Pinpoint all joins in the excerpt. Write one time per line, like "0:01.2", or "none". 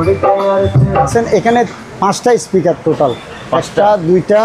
0:01.1